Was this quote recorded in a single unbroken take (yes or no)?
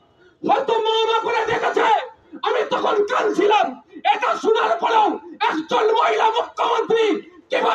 yes